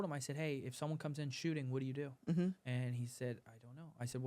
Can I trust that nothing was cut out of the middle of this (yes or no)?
yes